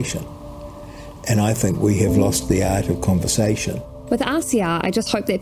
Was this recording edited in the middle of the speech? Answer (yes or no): no